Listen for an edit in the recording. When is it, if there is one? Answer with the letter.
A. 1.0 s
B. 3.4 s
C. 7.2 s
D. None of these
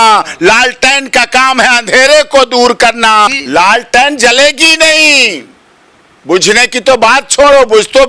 B